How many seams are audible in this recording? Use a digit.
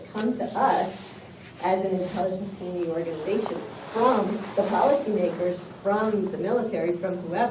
0